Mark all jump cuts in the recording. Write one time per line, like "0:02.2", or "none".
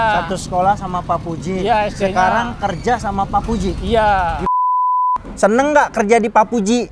0:04.7